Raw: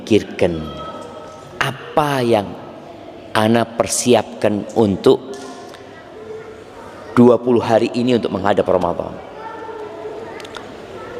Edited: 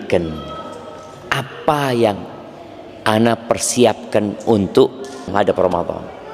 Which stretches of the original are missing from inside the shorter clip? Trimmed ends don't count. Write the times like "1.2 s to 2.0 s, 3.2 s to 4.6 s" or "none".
5.6 s to 8.4 s